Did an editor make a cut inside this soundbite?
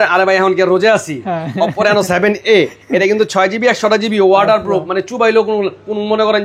no; 0 cuts

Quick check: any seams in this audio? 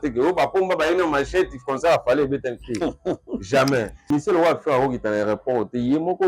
yes; 1 cut; at 4.0 s

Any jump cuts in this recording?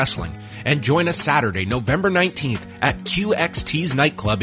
no; 0 cuts

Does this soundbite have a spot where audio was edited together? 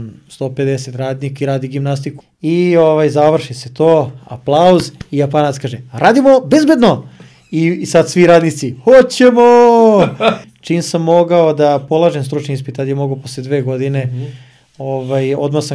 yes; 2 cuts; at 2.2 s, 10.5 s

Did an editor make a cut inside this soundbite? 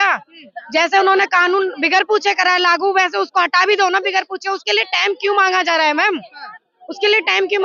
no; 0 cuts

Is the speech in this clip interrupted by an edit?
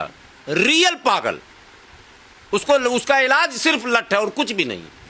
no; 0 cuts

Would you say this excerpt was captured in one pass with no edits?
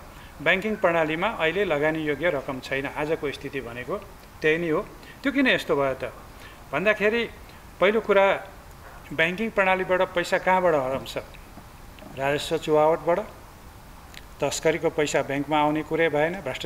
yes; 0 cuts

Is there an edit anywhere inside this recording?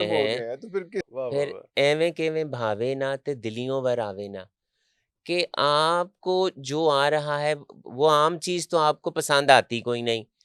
yes; 1 cut; at 1.0 s

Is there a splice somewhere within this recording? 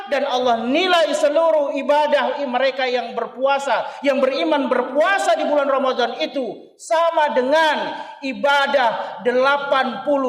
no; 0 cuts

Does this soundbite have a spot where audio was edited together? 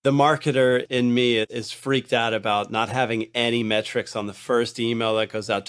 yes; 1 cut; at 1.5 s

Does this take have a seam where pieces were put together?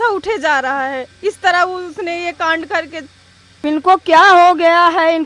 yes; 1 cut; at 3.5 s

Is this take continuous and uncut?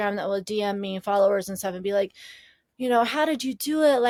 yes; 0 cuts

